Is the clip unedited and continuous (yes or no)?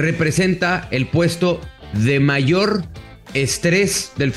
yes